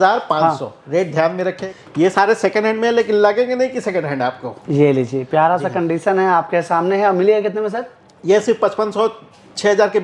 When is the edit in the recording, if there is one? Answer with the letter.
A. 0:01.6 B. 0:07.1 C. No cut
A